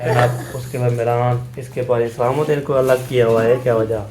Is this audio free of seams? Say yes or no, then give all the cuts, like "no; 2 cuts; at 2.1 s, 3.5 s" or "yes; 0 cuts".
yes; 0 cuts